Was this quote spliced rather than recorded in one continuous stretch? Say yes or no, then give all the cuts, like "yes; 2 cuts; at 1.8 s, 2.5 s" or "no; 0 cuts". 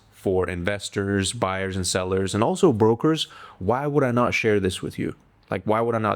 no; 0 cuts